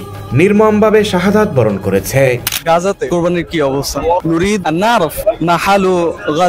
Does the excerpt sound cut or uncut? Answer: uncut